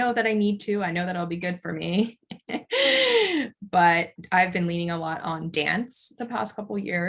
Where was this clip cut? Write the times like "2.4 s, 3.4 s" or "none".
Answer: 4.2 s